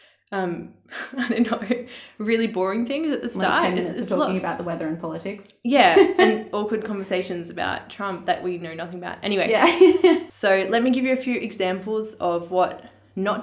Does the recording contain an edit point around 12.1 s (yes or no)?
no